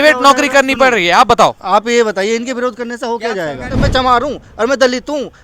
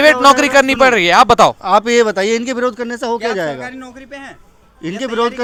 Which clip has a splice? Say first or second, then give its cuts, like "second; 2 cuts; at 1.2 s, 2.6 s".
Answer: first; 1 cut; at 3.8 s